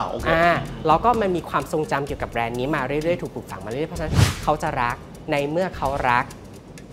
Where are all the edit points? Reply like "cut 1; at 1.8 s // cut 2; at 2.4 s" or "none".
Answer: none